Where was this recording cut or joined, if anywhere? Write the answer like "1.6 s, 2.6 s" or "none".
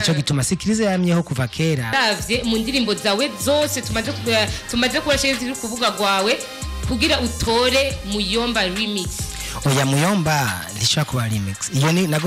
1.9 s